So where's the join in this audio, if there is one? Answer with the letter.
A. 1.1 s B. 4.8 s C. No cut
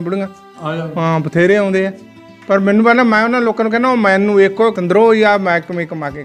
B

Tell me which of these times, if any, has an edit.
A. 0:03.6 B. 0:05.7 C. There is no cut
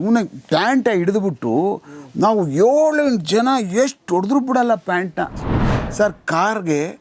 B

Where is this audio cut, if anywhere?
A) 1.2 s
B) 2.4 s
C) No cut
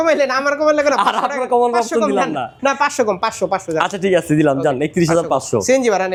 C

